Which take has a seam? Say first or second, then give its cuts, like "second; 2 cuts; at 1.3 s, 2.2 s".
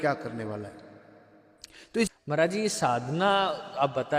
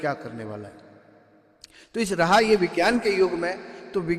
first; 1 cut; at 2.1 s